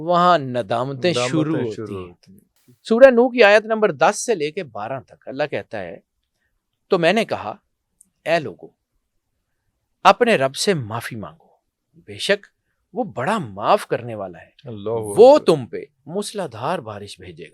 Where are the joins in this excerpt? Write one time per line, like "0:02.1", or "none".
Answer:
0:02.7